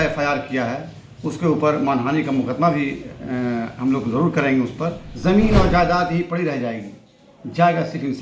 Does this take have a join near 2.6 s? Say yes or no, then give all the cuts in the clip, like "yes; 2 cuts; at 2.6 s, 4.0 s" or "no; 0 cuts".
no; 1 cut; at 5.1 s